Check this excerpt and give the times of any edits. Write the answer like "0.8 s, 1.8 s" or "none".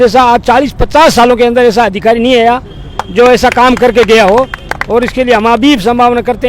none